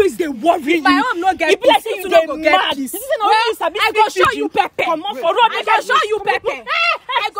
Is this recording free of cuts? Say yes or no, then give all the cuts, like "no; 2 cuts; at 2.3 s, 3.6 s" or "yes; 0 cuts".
yes; 0 cuts